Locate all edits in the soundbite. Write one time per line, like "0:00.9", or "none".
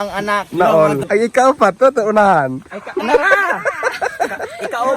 0:01.0